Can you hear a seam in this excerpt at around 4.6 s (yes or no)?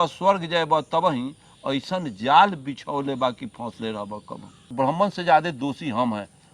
yes